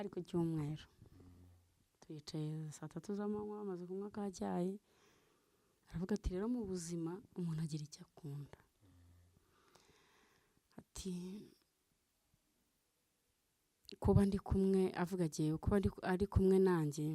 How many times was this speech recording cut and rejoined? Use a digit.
0